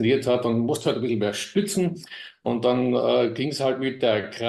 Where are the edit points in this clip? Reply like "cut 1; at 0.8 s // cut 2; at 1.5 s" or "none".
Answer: none